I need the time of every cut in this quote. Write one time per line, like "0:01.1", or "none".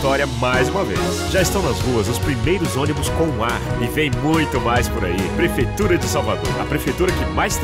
none